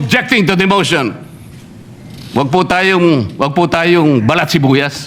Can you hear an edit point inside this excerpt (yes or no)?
no